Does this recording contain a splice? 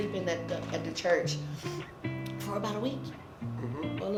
no; 0 cuts

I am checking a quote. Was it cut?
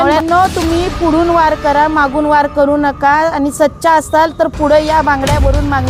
no; 0 cuts

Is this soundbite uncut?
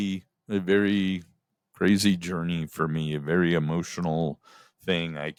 yes; 0 cuts

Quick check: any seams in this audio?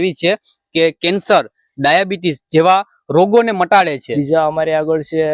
yes; 1 cut; at 4.0 s

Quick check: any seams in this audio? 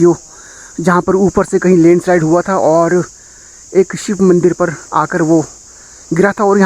no; 0 cuts

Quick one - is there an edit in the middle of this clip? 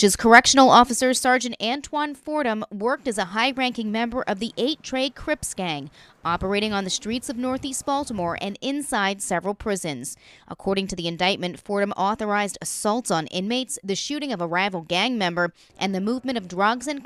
no; 0 cuts

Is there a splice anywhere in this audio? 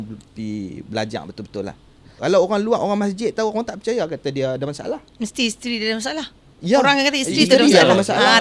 yes; 1 cut; at 2.1 s

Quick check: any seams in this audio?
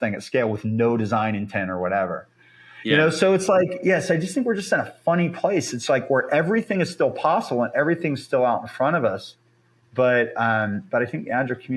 no; 0 cuts

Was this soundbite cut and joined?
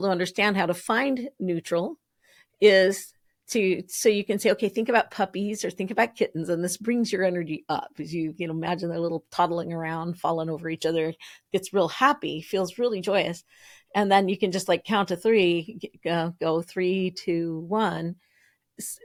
no; 0 cuts

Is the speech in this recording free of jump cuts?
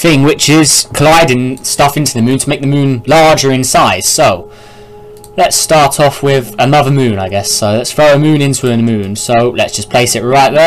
no; 1 cut; at 3.2 s

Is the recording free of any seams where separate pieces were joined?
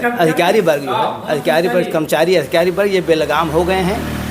yes; 0 cuts

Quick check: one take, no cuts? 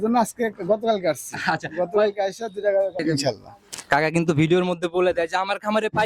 no; 1 cut; at 3.0 s

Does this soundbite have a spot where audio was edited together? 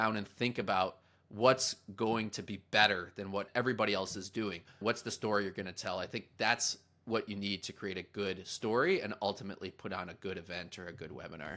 yes; 2 cuts; at 3.5 s, 4.8 s

